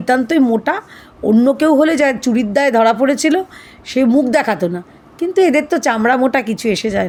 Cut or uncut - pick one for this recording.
uncut